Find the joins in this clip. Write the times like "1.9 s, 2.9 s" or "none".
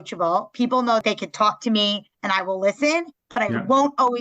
1.0 s